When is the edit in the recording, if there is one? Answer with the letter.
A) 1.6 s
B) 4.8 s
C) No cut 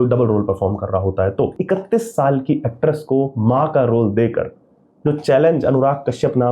A